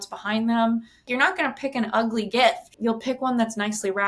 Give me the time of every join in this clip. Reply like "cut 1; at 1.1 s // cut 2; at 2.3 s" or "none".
cut 1; at 1.1 s // cut 2; at 2.7 s